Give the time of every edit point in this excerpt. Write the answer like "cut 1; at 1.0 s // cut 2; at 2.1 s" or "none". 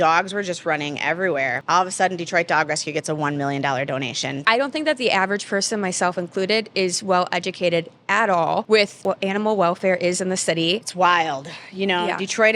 cut 1; at 1.6 s // cut 2; at 4.3 s // cut 3; at 9.0 s // cut 4; at 10.9 s